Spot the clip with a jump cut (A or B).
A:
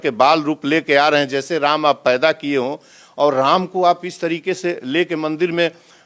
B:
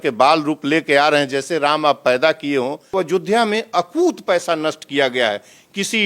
B